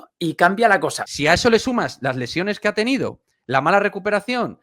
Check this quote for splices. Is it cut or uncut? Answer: cut